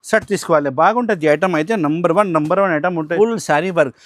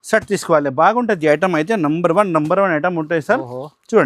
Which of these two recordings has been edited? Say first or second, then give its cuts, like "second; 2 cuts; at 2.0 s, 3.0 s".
first; 1 cut; at 3.1 s